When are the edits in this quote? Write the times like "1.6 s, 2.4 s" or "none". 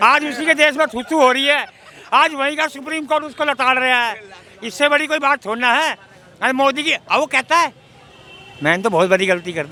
none

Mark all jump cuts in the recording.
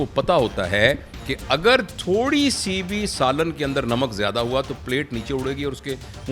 1.9 s

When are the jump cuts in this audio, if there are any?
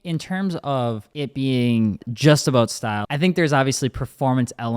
1.1 s, 2.1 s, 3.0 s

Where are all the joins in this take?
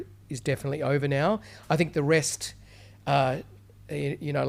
none

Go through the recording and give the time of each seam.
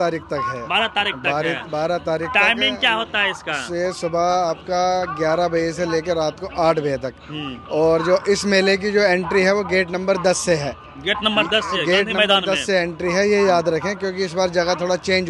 none

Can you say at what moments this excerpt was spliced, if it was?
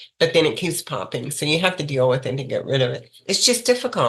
3.2 s

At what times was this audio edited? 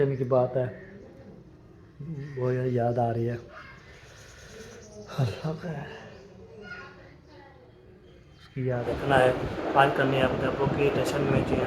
3.6 s, 8.8 s

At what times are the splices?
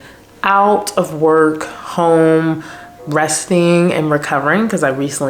none

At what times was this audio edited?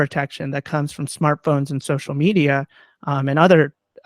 none

